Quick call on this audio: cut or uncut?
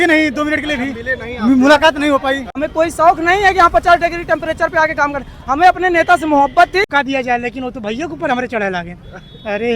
cut